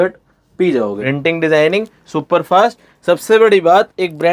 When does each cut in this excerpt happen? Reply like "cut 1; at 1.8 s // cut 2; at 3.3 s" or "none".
cut 1; at 1.0 s

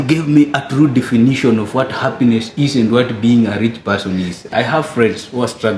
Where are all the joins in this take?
cut 1; at 4.5 s

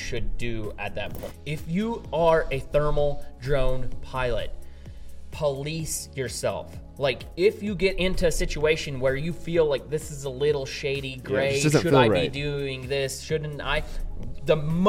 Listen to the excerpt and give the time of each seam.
cut 1; at 1.3 s

